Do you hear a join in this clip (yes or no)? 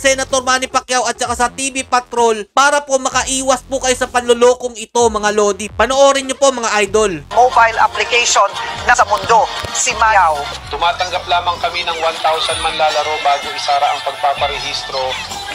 yes